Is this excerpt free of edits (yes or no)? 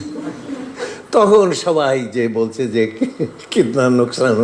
yes